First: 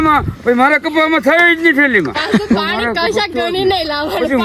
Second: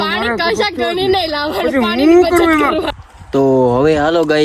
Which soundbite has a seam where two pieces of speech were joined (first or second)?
second